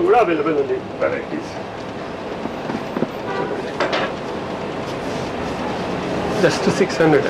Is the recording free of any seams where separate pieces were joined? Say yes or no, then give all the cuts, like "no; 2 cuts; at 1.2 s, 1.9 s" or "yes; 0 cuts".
yes; 0 cuts